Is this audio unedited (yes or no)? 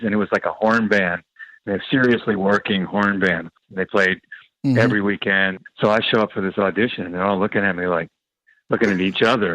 no